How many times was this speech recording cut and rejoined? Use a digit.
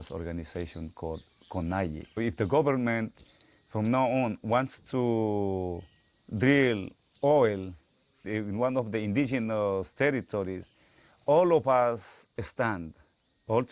2